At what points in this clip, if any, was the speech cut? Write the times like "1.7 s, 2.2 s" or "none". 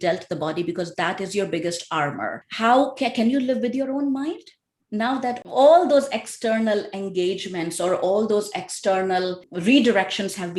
2.4 s, 9.5 s